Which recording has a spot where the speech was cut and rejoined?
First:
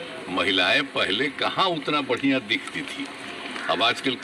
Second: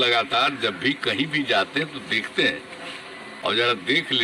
second; 1 cut; at 3.3 s

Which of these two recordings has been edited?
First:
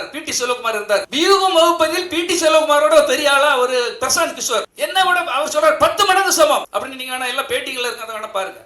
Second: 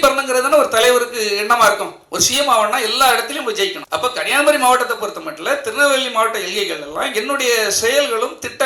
first; 1 cut; at 4.7 s

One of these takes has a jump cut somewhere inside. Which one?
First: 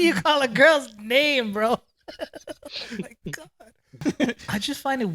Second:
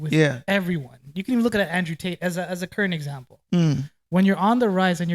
first; 1 cut; at 3.9 s

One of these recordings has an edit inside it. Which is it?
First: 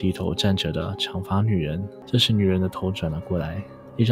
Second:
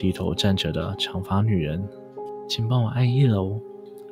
first; 1 cut; at 2.0 s

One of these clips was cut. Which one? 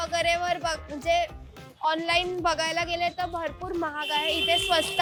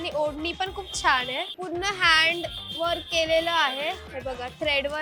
second; 1 cut; at 1.5 s

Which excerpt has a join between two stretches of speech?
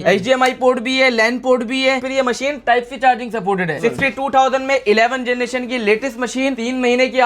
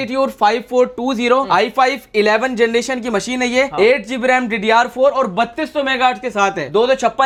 first; 3 cuts; at 2.1 s, 3.8 s, 6.5 s

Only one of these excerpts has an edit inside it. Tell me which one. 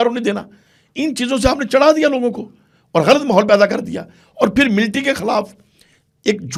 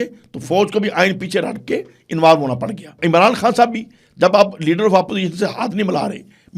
second; 1 cut; at 3.0 s

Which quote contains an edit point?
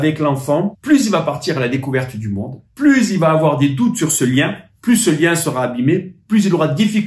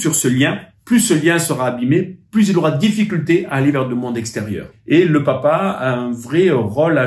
second; 1 cut; at 4.7 s

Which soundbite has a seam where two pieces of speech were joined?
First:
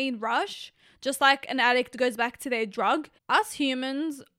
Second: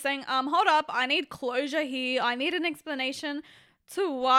first; 1 cut; at 3.1 s

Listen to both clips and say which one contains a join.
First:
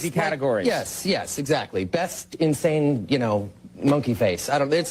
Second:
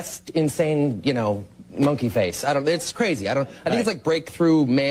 first; 1 cut; at 0.9 s

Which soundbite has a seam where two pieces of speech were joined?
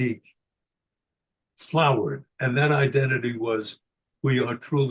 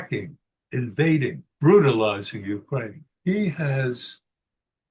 second; 2 cuts; at 1.5 s, 3.0 s

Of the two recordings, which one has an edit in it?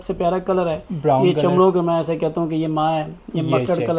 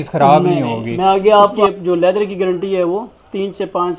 second; 1 cut; at 1.6 s

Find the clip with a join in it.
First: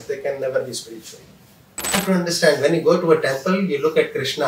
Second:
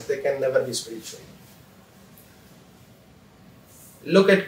first; 1 cut; at 2.0 s

